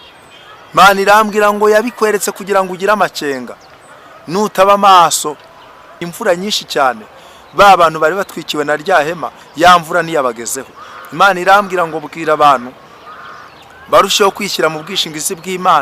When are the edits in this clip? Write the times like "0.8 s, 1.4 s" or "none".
6.0 s